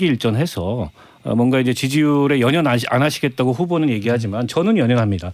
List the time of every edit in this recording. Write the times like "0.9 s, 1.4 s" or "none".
none